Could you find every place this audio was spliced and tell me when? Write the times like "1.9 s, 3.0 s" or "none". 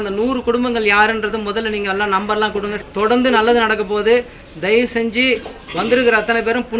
2.8 s